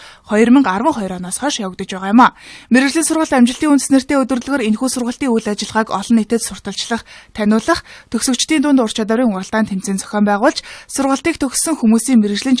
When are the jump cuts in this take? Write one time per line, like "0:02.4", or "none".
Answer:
0:08.4